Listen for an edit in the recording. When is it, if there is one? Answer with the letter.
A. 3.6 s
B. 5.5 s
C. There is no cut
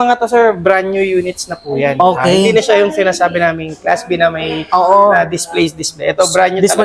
C